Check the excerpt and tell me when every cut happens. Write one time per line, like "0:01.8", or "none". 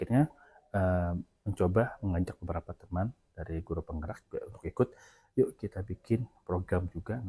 none